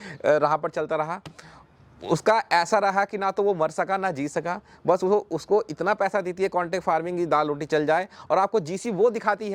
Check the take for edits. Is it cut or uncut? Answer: uncut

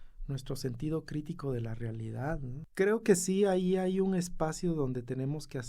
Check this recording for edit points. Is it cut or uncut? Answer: cut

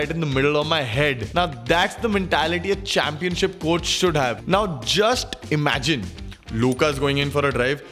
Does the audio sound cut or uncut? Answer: cut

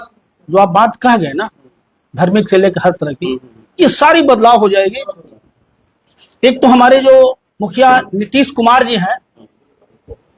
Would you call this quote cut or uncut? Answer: uncut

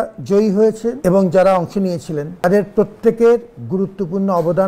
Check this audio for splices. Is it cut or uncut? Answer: cut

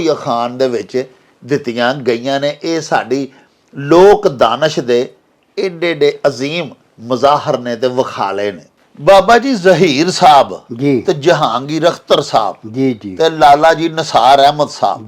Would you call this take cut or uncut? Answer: uncut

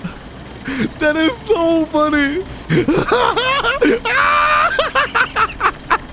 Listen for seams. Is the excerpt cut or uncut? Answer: cut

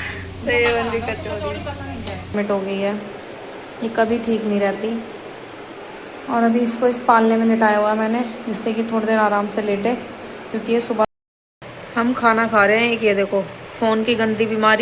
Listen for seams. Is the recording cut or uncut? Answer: cut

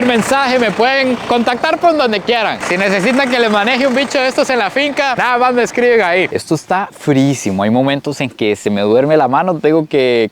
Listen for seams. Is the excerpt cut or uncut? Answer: cut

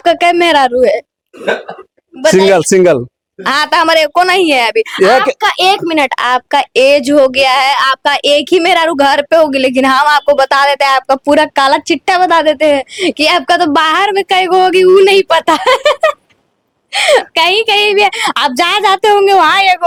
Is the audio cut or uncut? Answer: uncut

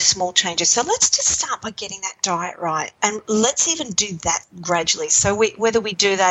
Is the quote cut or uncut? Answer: cut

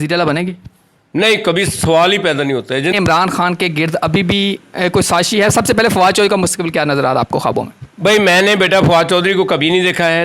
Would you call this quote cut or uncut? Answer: cut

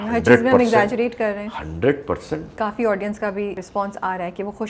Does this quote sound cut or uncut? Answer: cut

